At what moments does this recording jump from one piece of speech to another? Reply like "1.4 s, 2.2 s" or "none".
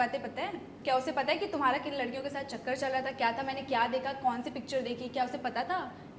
none